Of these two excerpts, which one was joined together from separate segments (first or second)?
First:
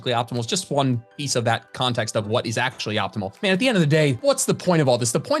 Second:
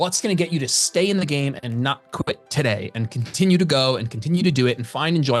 first